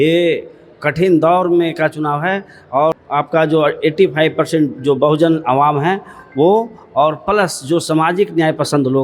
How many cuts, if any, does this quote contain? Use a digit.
1